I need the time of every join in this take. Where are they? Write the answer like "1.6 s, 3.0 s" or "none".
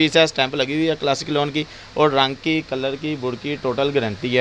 none